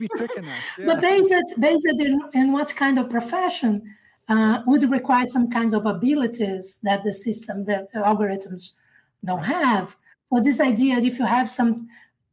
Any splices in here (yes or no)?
no